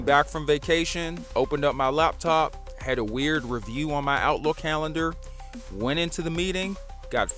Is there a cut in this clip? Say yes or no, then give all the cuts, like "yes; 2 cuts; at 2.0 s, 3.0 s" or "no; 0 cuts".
no; 0 cuts